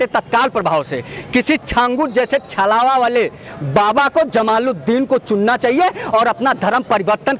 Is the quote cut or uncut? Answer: uncut